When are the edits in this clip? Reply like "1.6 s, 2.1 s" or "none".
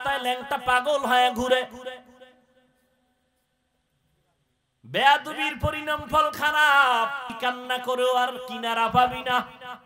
7.3 s